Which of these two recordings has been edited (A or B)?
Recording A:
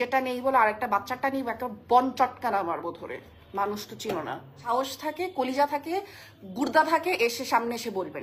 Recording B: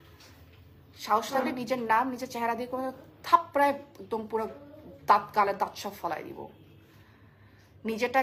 A